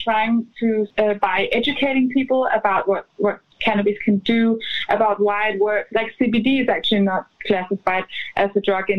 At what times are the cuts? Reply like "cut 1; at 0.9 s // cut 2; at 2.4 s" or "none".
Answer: cut 1; at 0.9 s // cut 2; at 5.9 s